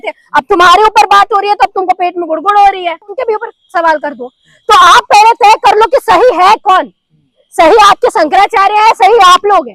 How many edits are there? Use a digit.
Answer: 1